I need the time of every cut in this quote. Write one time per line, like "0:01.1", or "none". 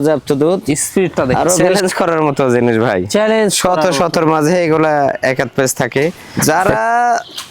0:01.7
0:06.3